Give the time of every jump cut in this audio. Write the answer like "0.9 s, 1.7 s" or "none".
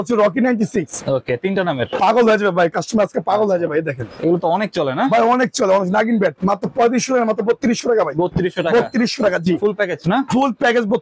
none

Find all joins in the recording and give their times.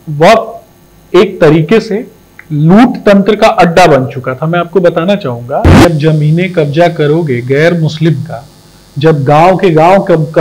5.9 s

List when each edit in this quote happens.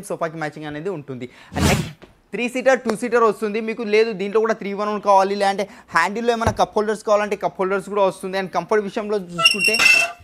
none

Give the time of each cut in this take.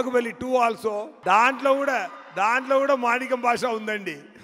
1.1 s

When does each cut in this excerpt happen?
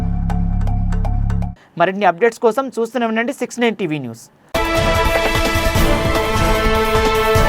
none

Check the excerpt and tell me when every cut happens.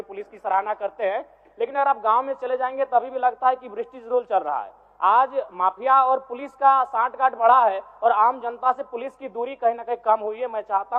none

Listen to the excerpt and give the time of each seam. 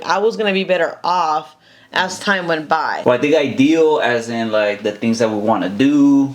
3.0 s

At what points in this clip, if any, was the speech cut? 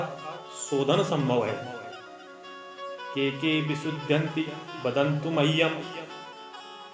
5.9 s

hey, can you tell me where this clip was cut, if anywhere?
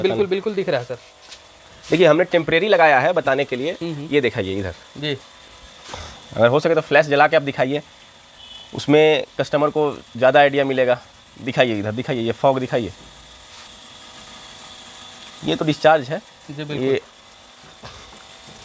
none

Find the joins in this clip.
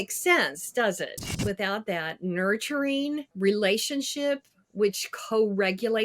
1.3 s, 3.3 s

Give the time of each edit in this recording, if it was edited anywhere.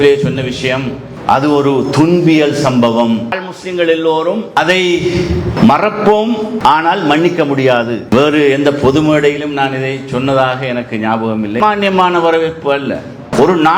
3.3 s, 8.0 s, 11.6 s

